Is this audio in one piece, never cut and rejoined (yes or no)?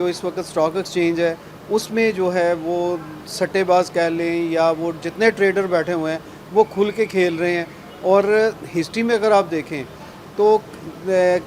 yes